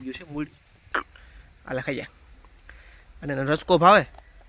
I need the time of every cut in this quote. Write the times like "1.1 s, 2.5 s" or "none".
0.9 s

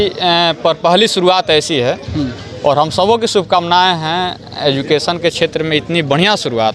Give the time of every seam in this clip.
none

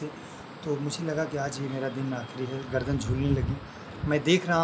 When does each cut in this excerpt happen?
none

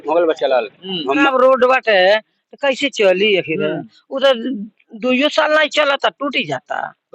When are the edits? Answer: 1.3 s

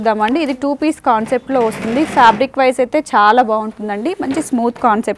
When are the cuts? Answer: none

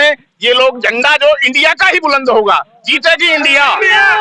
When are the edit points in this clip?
none

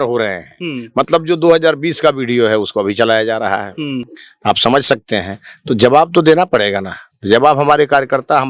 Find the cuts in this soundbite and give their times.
none

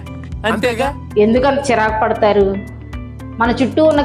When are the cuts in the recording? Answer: none

